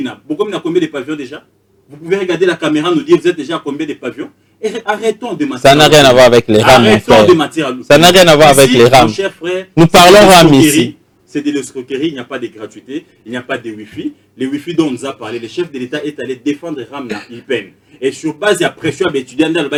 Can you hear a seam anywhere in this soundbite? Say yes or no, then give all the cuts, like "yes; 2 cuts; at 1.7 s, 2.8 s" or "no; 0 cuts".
no; 0 cuts